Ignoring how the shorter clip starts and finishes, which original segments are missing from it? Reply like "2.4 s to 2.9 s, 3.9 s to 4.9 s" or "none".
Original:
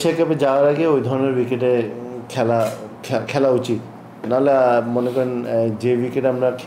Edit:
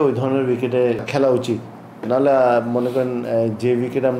1.9 s to 3.3 s